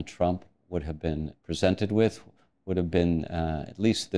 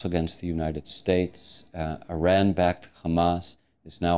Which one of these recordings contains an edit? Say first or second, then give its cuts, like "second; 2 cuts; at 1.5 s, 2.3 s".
first; 1 cut; at 1.4 s